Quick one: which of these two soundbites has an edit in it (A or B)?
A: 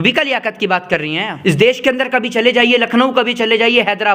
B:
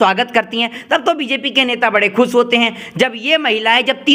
A